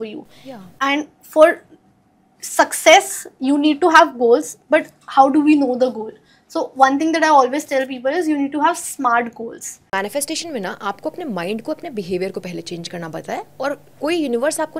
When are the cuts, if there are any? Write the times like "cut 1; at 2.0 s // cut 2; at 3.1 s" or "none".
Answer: cut 1; at 9.9 s